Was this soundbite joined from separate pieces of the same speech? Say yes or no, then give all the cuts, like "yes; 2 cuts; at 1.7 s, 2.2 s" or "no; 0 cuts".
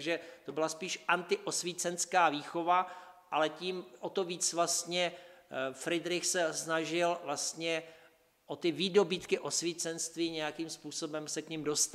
no; 0 cuts